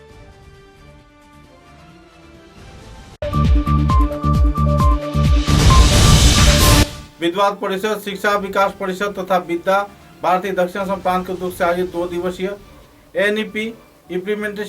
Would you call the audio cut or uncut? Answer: cut